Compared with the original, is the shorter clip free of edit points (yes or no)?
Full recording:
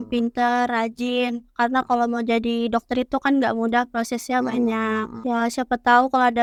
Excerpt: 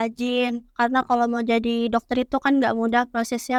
yes